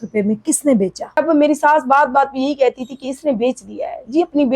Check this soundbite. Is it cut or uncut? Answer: cut